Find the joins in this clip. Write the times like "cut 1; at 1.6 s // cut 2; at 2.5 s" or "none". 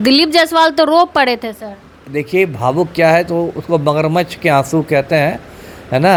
none